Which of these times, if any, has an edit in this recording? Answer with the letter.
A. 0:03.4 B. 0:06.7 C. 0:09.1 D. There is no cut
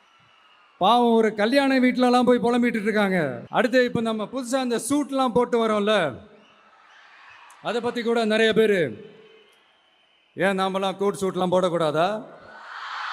A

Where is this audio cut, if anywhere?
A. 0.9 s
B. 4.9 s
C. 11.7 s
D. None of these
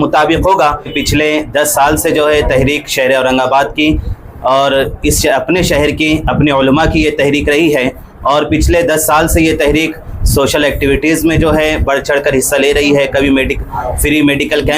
A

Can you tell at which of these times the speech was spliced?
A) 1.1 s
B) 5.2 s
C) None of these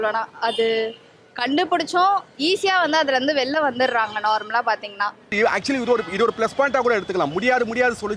B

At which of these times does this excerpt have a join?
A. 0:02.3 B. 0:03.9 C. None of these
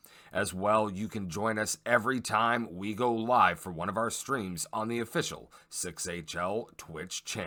C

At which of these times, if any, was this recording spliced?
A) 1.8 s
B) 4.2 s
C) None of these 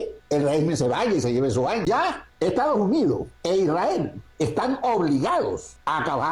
A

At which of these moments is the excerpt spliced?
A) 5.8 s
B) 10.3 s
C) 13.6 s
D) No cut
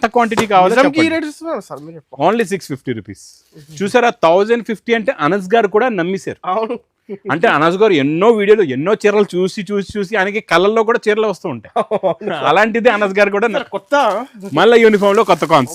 C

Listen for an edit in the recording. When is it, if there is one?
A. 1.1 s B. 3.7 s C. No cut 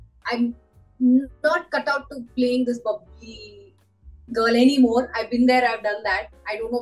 C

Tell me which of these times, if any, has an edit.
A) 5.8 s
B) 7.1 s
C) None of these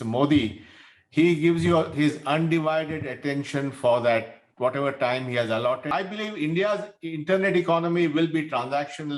A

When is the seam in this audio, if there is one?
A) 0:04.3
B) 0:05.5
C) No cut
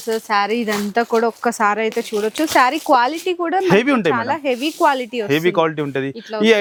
C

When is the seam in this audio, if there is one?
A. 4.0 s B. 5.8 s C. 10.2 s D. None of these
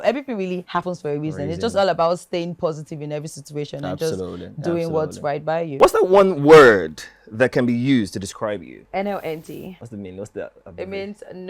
B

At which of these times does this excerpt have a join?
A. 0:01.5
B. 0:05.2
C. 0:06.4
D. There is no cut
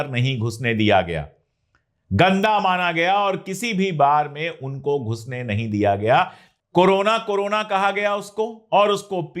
C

